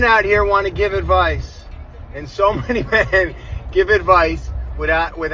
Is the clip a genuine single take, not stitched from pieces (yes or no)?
yes